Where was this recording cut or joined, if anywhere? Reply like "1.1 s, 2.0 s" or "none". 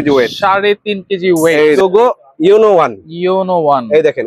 1.6 s